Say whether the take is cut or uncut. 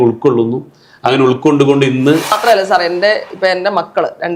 cut